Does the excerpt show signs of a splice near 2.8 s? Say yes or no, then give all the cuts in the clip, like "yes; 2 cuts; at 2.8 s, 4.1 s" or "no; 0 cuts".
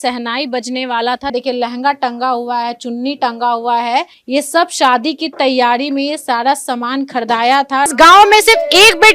no; 3 cuts; at 1.3 s, 4.2 s, 7.9 s